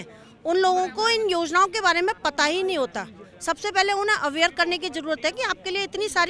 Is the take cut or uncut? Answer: uncut